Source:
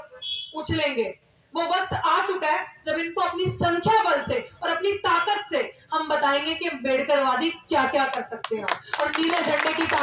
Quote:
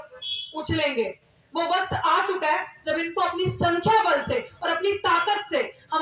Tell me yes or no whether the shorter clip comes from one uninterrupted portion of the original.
yes